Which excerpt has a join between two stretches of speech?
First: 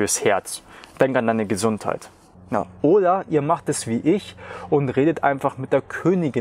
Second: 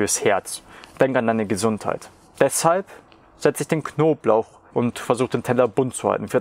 first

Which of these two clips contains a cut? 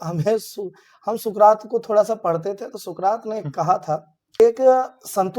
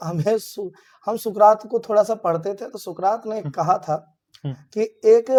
first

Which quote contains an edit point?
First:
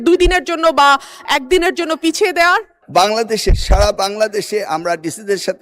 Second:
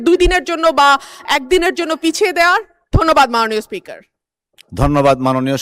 first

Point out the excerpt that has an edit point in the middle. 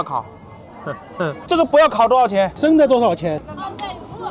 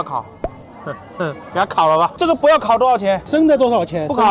first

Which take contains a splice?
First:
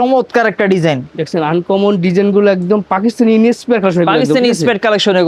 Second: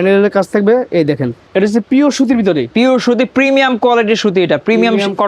second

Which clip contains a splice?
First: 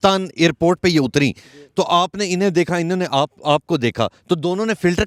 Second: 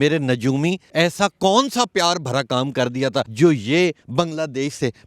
second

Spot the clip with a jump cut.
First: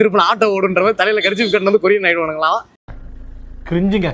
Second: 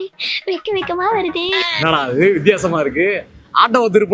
second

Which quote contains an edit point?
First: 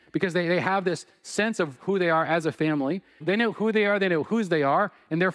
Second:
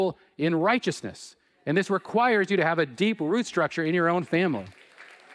first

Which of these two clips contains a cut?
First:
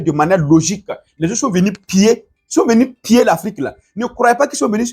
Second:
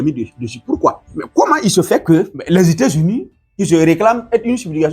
second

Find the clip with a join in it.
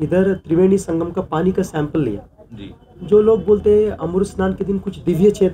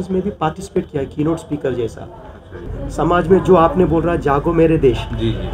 second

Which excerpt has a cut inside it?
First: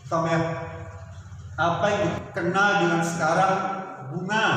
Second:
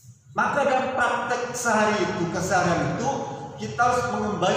first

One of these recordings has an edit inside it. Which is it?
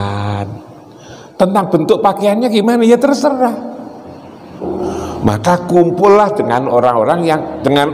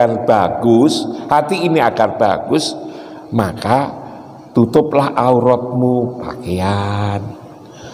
first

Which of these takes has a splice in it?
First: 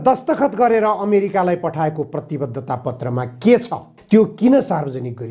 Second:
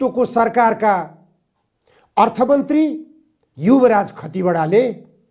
first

